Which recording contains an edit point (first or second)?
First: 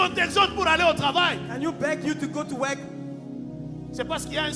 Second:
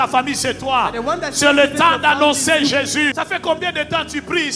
second